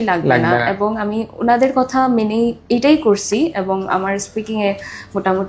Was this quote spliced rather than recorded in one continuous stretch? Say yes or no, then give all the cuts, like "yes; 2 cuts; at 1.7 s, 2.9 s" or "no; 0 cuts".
no; 0 cuts